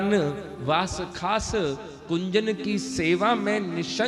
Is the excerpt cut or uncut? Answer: uncut